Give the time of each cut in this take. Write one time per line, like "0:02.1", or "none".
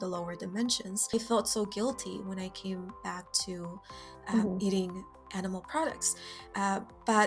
0:01.1